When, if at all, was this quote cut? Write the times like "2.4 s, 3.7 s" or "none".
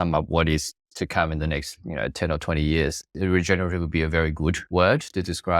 3.1 s, 4.6 s